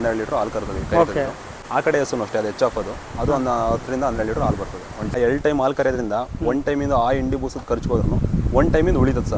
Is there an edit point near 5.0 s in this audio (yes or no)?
yes